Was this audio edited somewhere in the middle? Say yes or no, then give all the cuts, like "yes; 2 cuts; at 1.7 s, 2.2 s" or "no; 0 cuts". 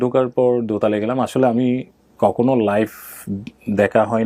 no; 0 cuts